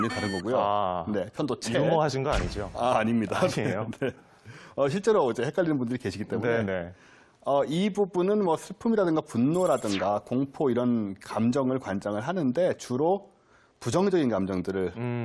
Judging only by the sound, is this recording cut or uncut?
cut